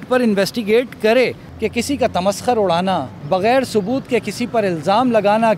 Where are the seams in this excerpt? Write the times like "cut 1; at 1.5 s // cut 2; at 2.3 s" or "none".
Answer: cut 1; at 1.4 s // cut 2; at 3.1 s